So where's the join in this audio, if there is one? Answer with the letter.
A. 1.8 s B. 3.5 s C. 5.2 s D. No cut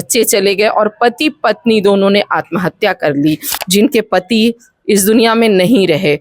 B